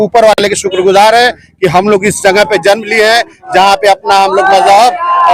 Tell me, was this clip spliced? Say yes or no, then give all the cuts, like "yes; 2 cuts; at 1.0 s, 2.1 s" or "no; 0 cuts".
no; 0 cuts